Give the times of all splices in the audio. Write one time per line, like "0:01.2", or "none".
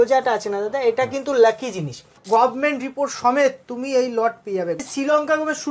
0:02.2
0:04.8